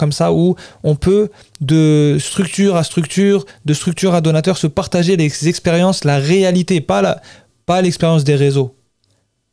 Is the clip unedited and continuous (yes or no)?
yes